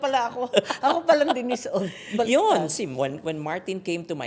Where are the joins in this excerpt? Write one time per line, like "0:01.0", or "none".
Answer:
none